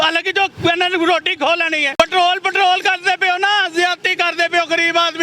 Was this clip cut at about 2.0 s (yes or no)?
yes